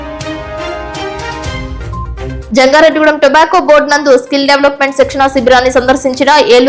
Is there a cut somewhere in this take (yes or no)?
yes